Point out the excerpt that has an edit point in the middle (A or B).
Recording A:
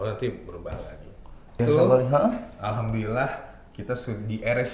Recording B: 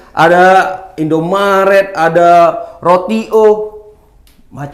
A